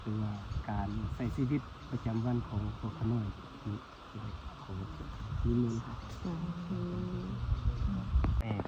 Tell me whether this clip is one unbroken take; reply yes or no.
yes